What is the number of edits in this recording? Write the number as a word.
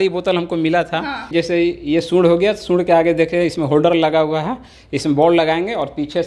one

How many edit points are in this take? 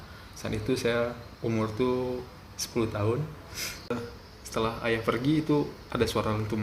one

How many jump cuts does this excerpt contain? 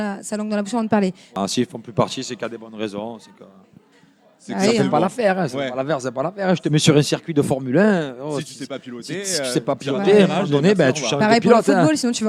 one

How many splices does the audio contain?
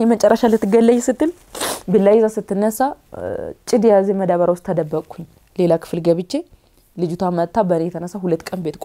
zero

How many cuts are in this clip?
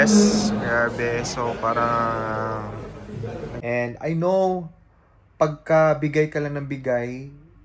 one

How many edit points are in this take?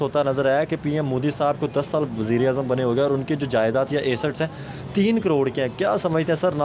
zero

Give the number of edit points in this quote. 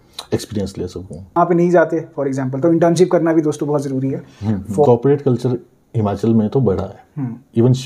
two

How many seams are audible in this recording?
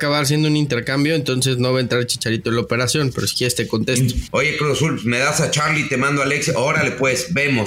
one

